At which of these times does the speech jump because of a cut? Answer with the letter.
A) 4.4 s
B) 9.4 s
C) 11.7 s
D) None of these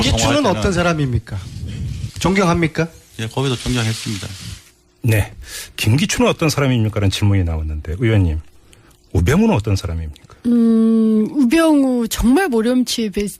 C